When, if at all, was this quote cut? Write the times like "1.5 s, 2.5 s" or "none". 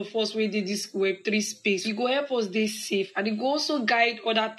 1.8 s